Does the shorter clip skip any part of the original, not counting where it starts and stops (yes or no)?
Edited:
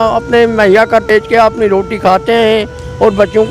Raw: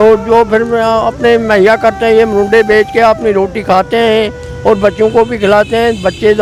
yes